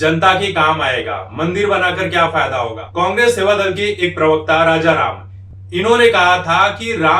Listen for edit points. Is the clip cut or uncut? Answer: cut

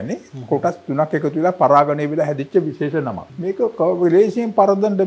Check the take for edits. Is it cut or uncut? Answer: cut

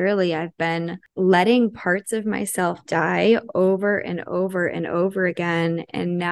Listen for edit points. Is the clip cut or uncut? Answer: cut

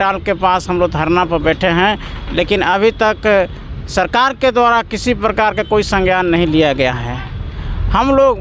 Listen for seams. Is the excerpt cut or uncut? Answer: uncut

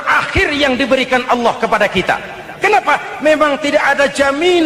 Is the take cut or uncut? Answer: uncut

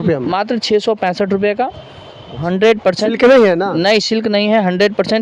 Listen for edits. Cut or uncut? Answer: cut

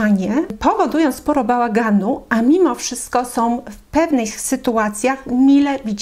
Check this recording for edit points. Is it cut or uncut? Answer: uncut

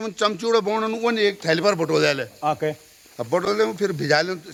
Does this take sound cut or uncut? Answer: uncut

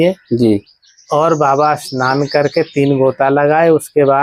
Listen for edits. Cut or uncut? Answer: uncut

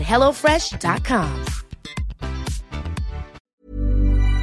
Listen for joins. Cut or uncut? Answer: cut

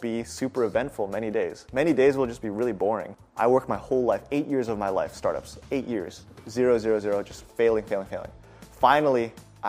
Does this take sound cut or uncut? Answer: cut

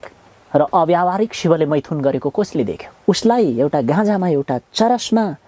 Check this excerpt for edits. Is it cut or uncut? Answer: cut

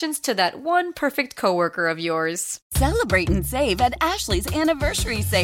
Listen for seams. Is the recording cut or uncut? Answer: cut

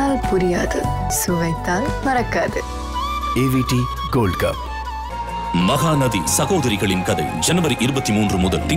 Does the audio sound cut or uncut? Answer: uncut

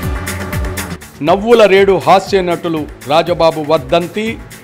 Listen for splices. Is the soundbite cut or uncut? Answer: cut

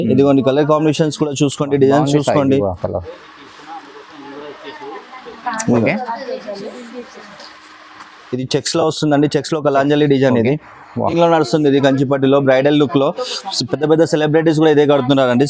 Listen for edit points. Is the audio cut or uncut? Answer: cut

